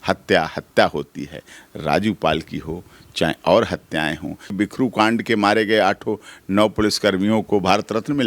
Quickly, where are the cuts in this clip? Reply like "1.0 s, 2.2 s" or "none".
4.5 s